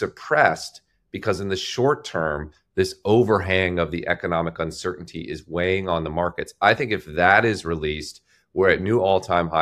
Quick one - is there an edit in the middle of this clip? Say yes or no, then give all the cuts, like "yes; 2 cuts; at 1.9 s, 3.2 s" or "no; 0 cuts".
no; 0 cuts